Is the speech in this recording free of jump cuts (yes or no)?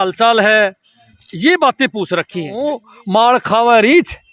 no